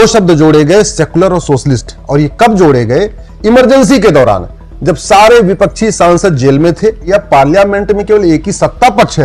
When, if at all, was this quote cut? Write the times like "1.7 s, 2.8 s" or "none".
7.0 s